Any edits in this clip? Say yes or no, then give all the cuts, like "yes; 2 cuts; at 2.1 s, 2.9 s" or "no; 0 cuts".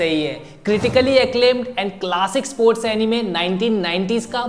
no; 0 cuts